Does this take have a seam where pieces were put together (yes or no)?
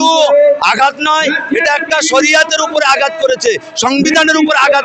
no